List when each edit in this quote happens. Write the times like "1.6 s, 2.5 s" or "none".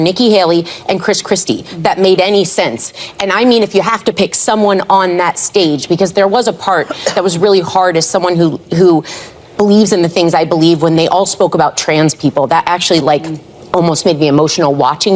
3.4 s